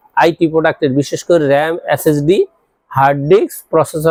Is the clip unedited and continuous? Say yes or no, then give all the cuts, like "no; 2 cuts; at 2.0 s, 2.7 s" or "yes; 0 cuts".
yes; 0 cuts